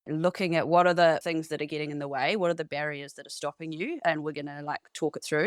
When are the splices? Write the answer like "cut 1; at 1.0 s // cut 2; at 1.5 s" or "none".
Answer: none